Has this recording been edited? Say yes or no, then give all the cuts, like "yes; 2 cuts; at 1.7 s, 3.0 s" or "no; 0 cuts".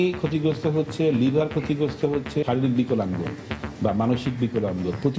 yes; 1 cut; at 2.5 s